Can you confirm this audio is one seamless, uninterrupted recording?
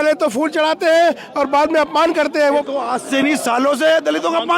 no; 1 cut; at 2.6 s

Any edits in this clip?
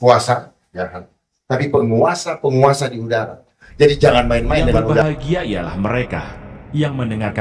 yes; 1 cut; at 5.0 s

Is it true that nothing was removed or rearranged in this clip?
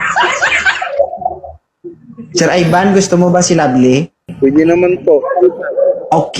no; 1 cut; at 4.2 s

